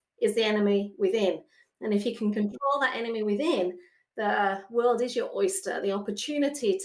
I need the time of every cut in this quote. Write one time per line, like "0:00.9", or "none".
none

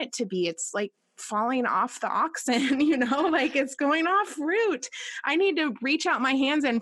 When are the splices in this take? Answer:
none

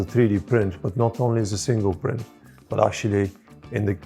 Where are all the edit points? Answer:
none

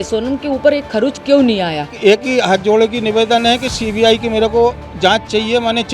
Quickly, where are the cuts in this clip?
0:01.9

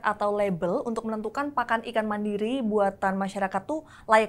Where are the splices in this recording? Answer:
none

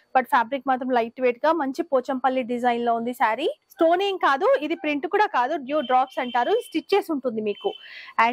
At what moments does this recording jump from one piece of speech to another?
0:03.6

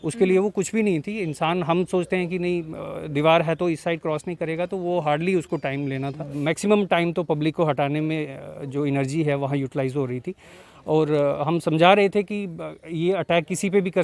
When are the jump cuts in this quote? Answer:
0:06.3

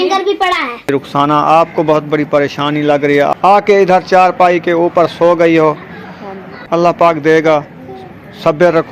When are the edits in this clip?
0:00.9
0:03.5
0:06.6

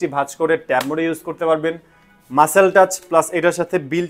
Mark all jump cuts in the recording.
none

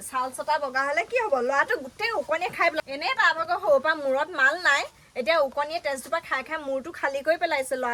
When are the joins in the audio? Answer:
0:02.8

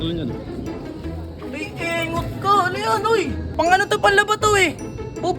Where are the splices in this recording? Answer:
0:03.4

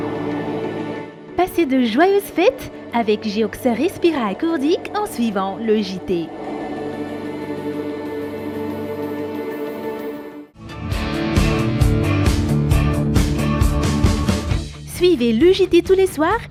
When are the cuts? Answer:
none

